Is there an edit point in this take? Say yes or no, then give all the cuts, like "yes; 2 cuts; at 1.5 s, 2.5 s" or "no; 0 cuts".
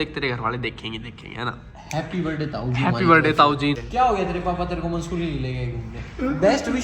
yes; 1 cut; at 3.8 s